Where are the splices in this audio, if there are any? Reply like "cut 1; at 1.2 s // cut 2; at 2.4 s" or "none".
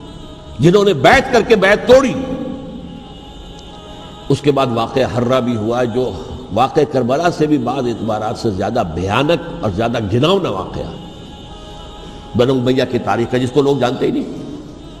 cut 1; at 3.1 s